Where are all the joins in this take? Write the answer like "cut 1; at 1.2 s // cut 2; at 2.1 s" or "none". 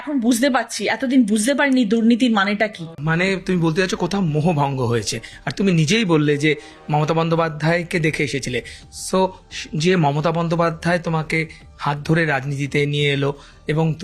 cut 1; at 2.9 s